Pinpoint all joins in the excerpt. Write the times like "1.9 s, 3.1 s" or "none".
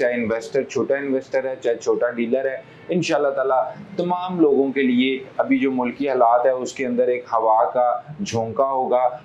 none

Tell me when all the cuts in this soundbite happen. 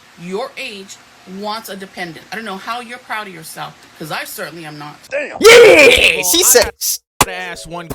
none

